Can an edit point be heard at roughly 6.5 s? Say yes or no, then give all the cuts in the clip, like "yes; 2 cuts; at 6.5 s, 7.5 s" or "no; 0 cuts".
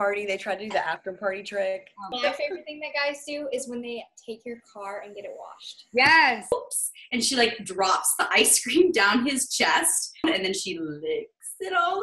yes; 3 cuts; at 2.0 s, 6.5 s, 10.2 s